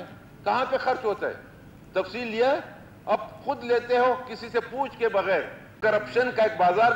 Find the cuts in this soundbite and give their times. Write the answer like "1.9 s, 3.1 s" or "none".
5.7 s

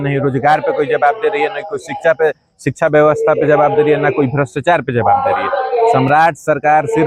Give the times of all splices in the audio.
none

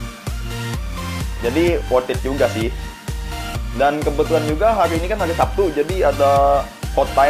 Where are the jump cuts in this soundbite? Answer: none

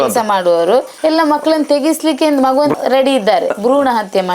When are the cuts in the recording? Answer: 0.9 s

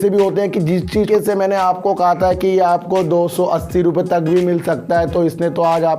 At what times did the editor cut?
0.9 s

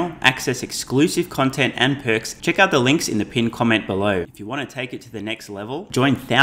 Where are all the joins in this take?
2.3 s, 4.3 s

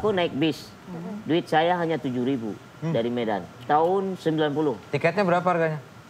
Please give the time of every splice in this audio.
3.5 s

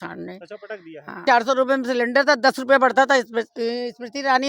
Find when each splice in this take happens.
1.2 s

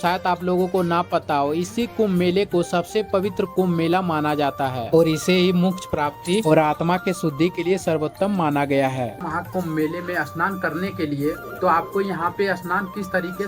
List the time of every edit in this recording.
9.2 s

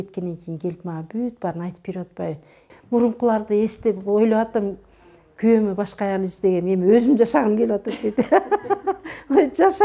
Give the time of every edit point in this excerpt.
2.7 s

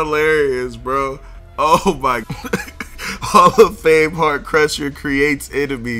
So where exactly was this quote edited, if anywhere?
2.3 s

